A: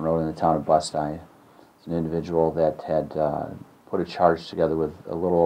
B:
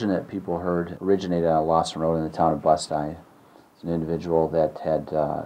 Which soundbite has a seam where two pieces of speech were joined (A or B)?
B